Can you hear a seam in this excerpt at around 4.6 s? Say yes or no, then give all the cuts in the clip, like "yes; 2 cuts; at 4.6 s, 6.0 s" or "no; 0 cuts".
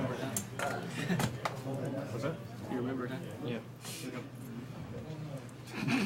no; 0 cuts